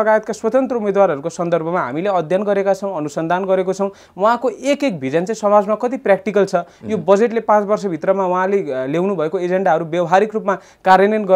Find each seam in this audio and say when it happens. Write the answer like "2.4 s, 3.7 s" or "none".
none